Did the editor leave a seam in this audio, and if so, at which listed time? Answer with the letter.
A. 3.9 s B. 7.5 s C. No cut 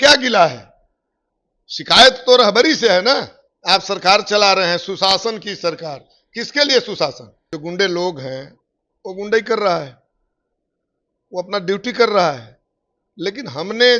B